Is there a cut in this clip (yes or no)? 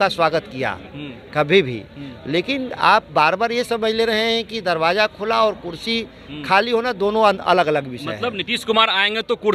no